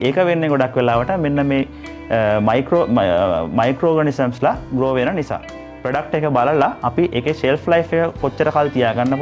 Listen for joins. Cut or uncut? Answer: cut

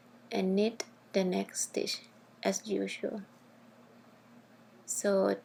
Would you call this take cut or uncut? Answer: uncut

